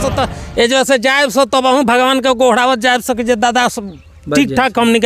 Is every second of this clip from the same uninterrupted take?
yes; 0 cuts

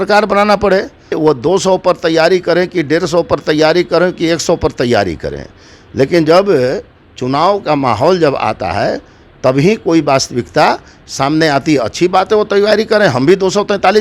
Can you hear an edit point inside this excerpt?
yes; 1 cut; at 1.1 s

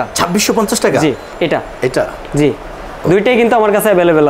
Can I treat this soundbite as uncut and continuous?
no; 1 cut; at 1.3 s

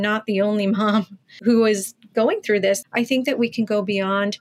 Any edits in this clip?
yes; 2 cuts; at 1.4 s, 2.8 s

